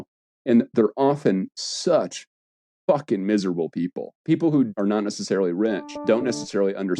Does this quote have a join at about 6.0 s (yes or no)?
yes